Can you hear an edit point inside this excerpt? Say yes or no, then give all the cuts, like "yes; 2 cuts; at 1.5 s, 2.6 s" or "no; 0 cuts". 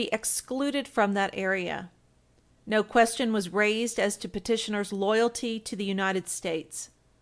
no; 0 cuts